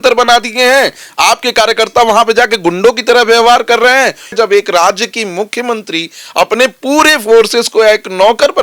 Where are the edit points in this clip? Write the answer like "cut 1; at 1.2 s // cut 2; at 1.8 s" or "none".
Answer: cut 1; at 4.3 s

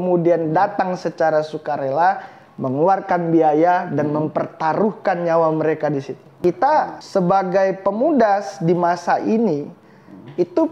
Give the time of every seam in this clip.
cut 1; at 6.3 s // cut 2; at 7.0 s

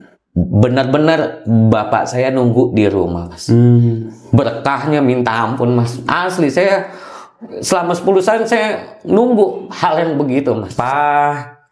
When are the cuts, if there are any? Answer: cut 1; at 10.7 s

